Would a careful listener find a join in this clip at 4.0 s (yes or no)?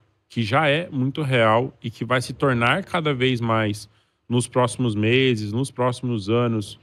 no